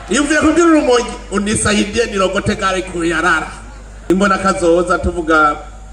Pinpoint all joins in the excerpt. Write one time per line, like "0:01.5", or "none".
0:04.1